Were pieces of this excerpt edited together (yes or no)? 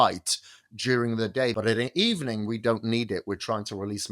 yes